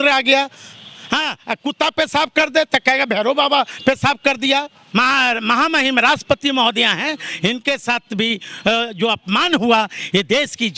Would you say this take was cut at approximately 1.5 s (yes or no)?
no